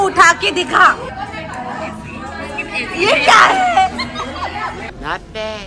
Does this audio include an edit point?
no; 0 cuts

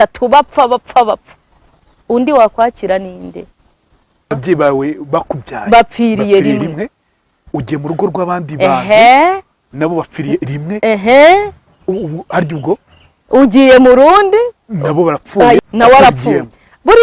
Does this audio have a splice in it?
yes; 2 cuts; at 4.4 s, 15.6 s

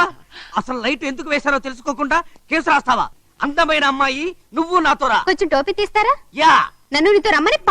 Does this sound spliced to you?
yes; 1 cut; at 3.2 s

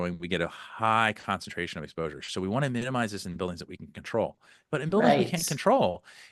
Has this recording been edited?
no; 0 cuts

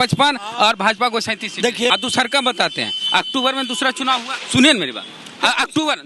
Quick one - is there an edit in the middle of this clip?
yes; 1 cut; at 1.9 s

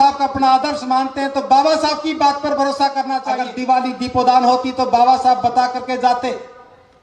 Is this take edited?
yes; 1 cut; at 3.4 s

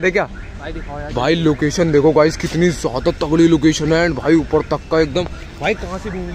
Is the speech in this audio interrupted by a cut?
no; 0 cuts

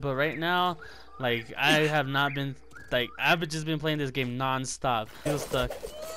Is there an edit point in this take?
yes; 1 cut; at 5.3 s

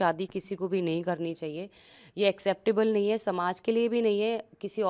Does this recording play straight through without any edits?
yes; 0 cuts

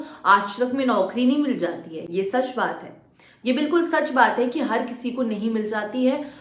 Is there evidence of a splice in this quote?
no; 0 cuts

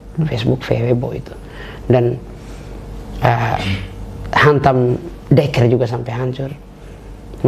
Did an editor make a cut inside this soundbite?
no; 0 cuts

